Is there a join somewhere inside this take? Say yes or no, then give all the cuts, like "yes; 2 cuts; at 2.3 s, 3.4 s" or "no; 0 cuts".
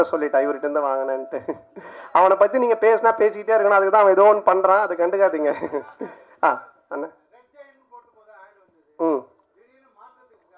no; 0 cuts